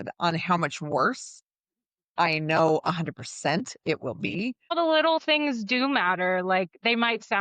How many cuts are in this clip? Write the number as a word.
one